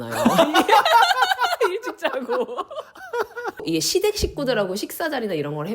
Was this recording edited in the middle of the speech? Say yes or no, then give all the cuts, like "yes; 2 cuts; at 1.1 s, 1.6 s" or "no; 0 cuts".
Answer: yes; 1 cut; at 3.6 s